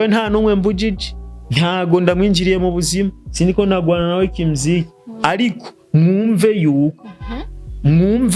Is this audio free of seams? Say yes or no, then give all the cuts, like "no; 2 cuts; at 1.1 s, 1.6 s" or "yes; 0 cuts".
yes; 0 cuts